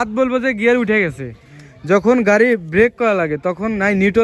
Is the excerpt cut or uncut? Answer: uncut